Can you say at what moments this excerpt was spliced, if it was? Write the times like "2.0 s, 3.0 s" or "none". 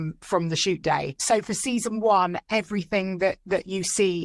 1.2 s